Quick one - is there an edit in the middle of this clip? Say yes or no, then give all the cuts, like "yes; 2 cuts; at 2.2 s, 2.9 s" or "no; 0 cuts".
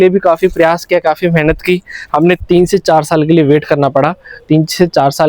yes; 1 cut; at 2.4 s